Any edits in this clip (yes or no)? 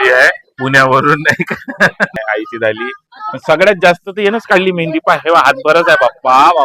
yes